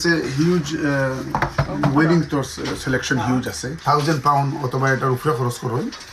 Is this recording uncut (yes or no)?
no